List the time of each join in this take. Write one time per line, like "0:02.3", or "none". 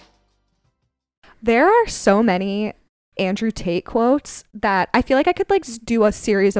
0:01.3